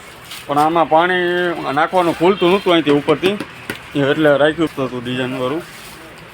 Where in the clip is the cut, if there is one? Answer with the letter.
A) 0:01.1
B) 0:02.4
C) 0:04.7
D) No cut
C